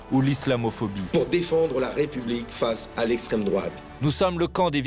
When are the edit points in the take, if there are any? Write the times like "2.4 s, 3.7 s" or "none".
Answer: none